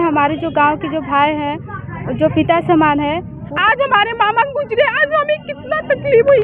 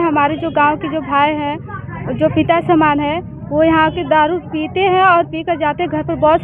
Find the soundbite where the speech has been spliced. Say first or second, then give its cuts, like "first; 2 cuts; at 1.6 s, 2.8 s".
first; 1 cut; at 3.4 s